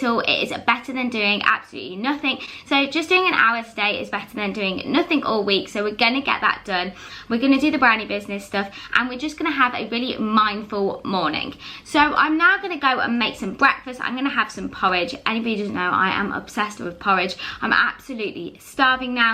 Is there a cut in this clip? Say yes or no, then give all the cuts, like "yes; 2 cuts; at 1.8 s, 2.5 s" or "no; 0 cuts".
no; 0 cuts